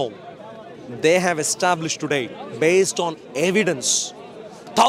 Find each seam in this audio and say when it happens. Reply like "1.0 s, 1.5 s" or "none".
none